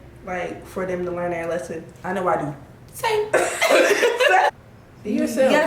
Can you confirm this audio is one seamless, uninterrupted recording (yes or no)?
no